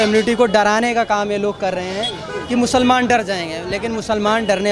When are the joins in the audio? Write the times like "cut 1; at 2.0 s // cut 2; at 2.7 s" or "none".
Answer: none